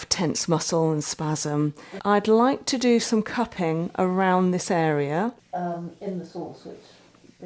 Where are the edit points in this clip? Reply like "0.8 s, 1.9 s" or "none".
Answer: 1.9 s, 5.4 s